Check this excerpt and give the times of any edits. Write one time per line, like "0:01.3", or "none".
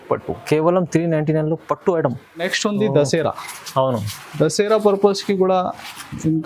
0:02.5